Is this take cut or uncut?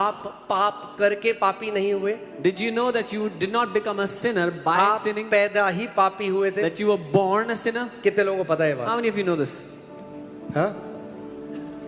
uncut